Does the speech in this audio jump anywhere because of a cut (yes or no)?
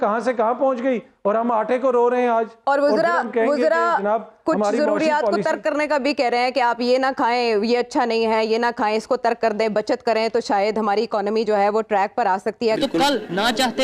yes